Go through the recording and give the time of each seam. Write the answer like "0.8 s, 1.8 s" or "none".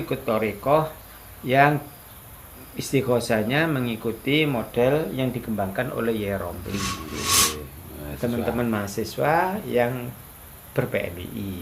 7.3 s